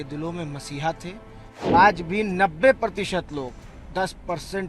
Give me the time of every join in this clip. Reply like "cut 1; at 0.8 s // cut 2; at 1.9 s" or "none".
cut 1; at 1.7 s